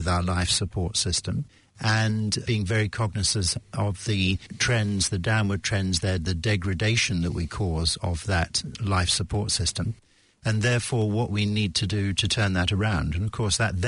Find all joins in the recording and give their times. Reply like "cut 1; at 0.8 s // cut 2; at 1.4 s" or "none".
none